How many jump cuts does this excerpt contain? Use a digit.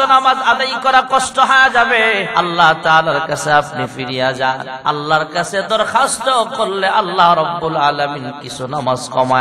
2